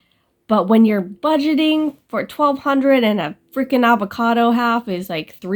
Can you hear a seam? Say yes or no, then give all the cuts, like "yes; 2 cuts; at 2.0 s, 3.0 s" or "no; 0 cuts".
no; 0 cuts